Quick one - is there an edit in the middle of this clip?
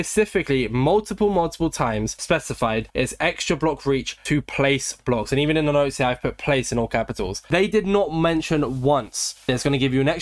no; 0 cuts

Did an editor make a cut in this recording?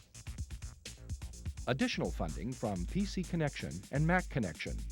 yes; 1 cut; at 1.6 s

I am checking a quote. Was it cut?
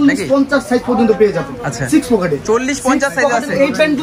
no; 0 cuts

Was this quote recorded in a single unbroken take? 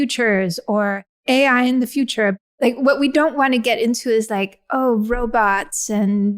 no; 2 cuts; at 1.2 s, 2.4 s

